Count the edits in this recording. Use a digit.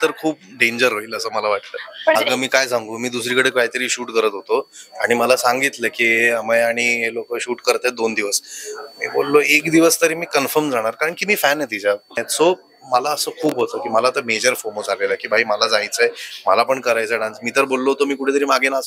2